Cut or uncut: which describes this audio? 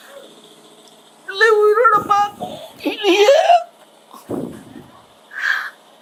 uncut